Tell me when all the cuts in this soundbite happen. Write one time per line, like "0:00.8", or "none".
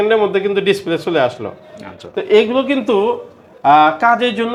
none